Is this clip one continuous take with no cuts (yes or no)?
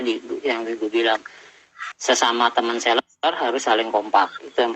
yes